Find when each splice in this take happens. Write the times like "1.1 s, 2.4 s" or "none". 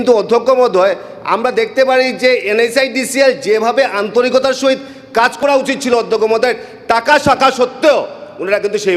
none

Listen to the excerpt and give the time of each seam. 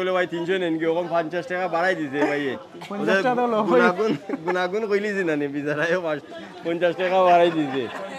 none

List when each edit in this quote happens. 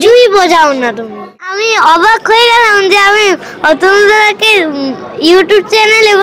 1.3 s

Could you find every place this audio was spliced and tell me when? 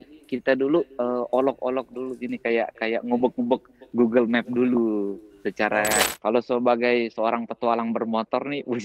6.0 s

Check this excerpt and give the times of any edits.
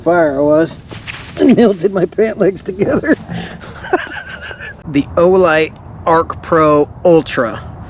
4.8 s

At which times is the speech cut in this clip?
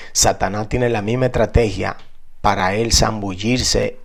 none

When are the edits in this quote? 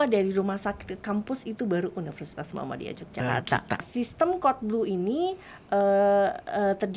3.8 s

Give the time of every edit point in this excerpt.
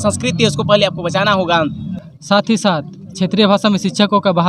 1.9 s

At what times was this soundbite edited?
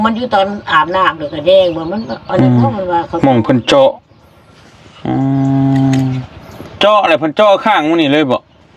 none

